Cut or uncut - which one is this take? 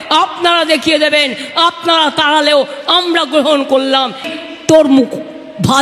cut